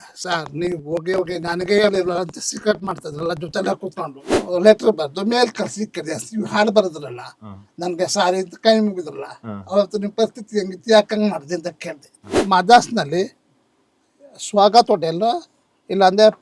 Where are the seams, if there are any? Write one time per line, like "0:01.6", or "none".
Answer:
0:04.4
0:12.3